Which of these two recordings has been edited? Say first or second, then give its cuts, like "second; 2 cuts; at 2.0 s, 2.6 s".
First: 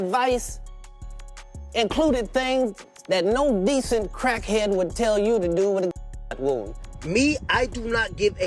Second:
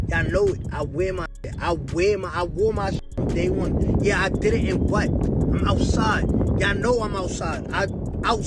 first; 1 cut; at 6.8 s